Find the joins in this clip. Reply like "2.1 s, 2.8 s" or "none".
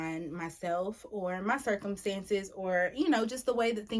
none

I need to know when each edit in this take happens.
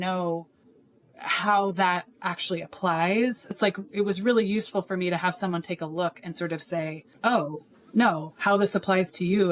3.6 s, 7.1 s

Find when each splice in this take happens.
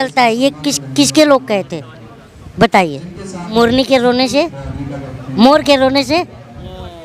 3.5 s

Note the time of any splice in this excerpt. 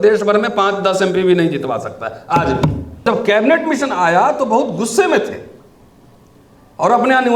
3.0 s

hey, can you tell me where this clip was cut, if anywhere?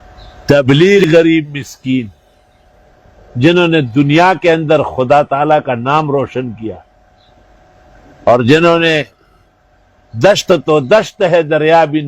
1.0 s

